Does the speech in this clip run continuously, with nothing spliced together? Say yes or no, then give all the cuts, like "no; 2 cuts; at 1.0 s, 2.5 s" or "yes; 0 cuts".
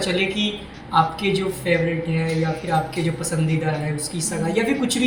yes; 0 cuts